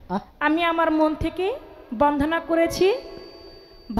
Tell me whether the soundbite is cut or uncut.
uncut